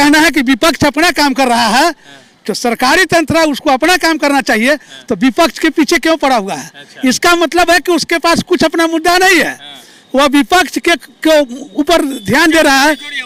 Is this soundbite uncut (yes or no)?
yes